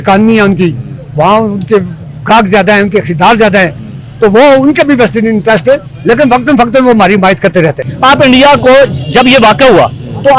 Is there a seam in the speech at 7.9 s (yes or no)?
yes